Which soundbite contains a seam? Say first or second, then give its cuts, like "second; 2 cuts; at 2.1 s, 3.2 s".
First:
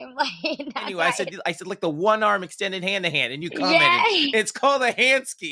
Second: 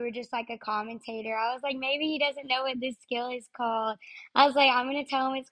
first; 1 cut; at 0.9 s